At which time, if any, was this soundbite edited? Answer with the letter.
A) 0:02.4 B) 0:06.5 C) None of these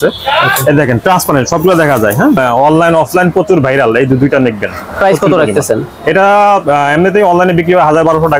A